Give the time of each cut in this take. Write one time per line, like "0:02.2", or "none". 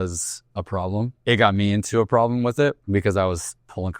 0:01.1
0:02.8

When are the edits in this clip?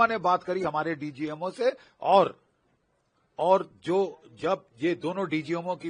none

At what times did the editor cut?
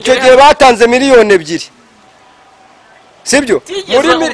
none

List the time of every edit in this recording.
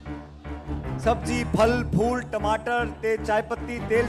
0:01.0

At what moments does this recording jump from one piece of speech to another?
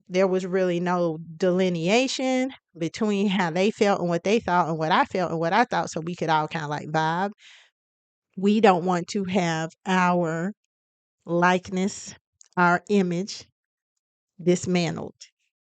0:07.5

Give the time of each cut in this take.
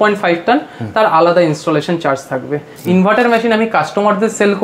0:02.7

